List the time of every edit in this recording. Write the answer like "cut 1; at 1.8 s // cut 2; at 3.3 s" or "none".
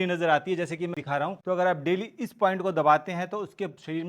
cut 1; at 1.3 s